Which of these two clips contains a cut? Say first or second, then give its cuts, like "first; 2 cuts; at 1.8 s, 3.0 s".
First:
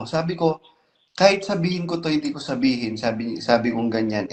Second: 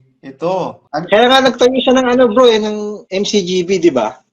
second; 1 cut; at 0.9 s